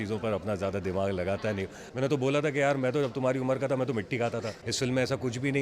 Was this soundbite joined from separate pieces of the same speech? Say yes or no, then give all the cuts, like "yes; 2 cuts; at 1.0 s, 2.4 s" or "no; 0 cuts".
yes; 2 cuts; at 1.8 s, 4.6 s